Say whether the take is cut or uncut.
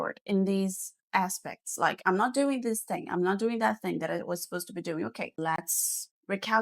cut